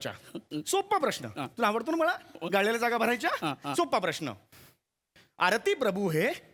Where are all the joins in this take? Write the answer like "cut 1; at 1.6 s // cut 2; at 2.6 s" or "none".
none